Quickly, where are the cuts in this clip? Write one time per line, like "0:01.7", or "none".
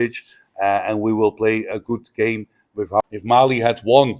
0:03.0